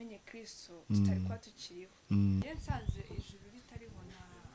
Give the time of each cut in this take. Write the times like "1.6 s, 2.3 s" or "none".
2.4 s

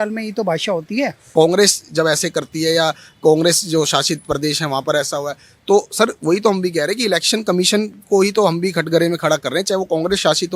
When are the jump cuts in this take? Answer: 1.2 s

